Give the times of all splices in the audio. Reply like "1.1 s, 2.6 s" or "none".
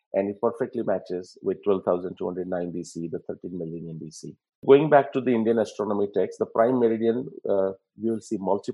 4.6 s